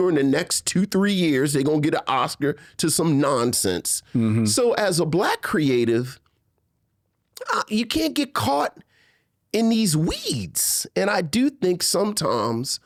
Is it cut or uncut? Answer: uncut